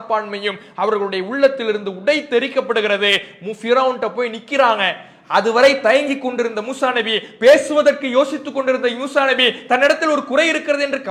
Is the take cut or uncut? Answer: uncut